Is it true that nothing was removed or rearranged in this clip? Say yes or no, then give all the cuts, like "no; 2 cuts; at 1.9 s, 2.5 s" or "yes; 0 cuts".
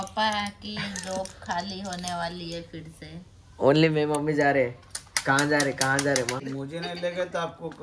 no; 1 cut; at 6.5 s